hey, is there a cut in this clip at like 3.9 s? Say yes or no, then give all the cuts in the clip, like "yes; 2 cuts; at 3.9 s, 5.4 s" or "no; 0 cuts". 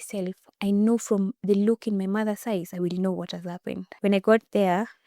yes; 1 cut; at 3.9 s